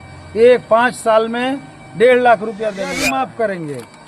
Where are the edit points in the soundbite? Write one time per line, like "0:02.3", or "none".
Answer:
0:03.0